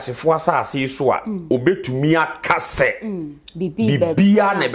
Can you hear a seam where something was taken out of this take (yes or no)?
no